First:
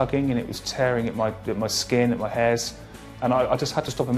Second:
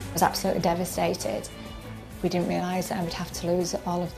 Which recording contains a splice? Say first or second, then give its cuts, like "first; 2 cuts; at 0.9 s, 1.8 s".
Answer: second; 1 cut; at 1.8 s